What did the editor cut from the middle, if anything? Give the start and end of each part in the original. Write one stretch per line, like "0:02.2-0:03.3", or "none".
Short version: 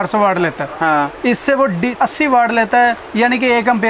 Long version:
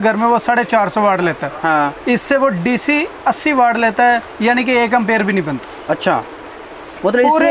0:02.8-0:03.2